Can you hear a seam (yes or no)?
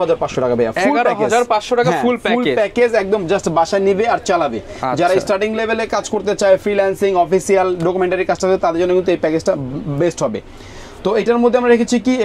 no